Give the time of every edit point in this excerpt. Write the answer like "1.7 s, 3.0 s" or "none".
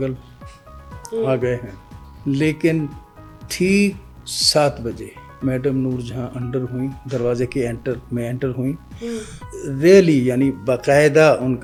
none